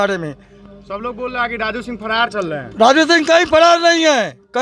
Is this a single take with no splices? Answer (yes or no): yes